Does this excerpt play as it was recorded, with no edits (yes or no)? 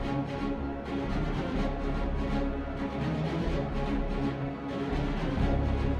yes